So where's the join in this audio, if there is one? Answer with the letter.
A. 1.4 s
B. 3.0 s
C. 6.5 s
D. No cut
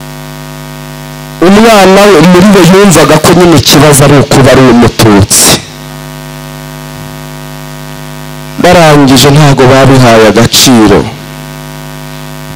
A